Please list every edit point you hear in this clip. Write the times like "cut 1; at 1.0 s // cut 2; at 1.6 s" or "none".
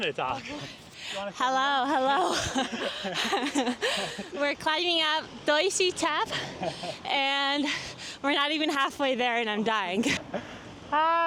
none